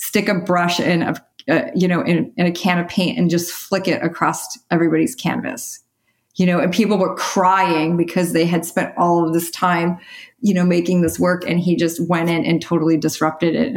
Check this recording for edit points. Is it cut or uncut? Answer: uncut